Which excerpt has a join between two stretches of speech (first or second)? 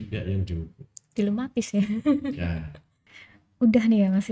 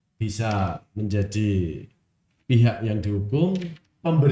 first